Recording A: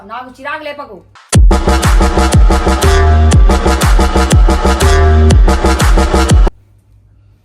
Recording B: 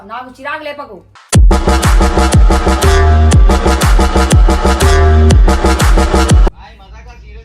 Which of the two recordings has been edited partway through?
B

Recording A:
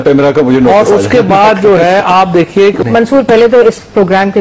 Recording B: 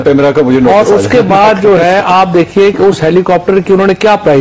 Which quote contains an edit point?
A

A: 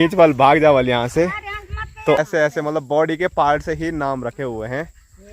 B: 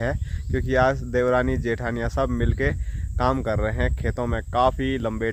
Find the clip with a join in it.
A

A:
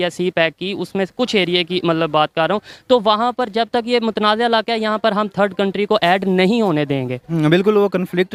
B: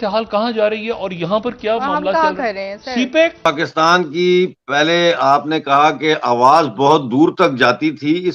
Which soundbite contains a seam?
B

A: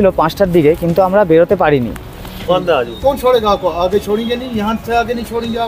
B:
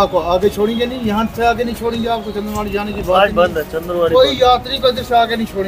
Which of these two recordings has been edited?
A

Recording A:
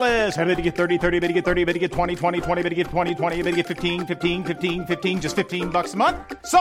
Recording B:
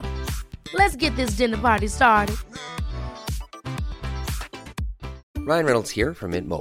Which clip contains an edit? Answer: B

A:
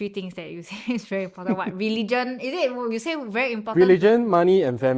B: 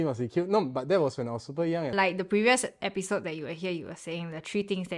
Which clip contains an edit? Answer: B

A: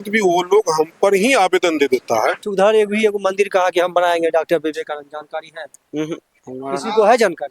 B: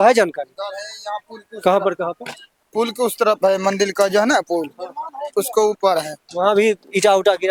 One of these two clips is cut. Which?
A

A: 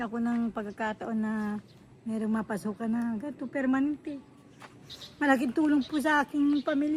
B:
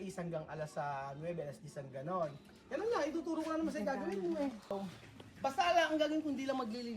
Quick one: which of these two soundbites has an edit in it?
B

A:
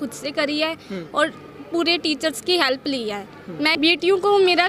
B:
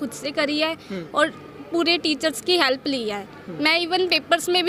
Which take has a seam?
A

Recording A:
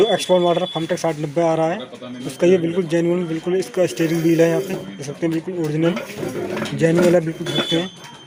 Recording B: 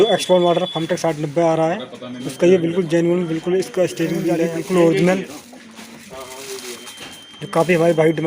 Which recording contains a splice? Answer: B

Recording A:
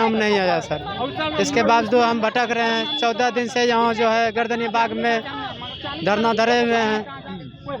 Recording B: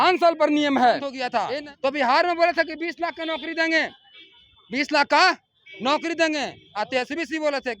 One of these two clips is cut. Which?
B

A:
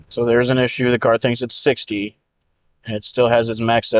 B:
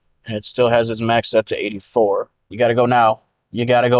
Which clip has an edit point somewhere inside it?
B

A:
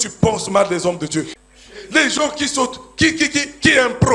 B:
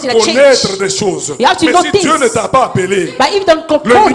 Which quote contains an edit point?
A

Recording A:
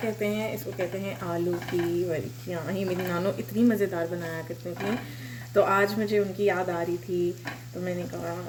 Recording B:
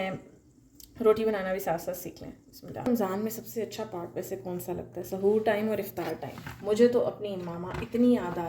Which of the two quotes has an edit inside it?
B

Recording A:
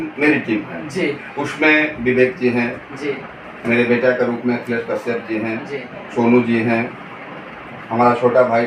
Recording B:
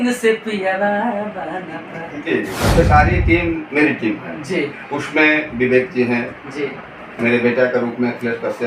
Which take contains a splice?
B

